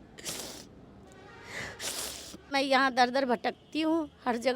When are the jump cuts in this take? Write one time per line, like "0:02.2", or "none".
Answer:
0:02.5